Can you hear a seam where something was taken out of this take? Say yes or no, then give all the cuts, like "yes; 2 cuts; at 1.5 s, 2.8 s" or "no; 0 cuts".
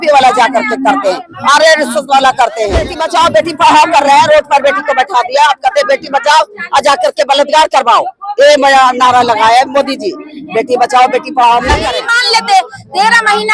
yes; 2 cuts; at 3.0 s, 11.9 s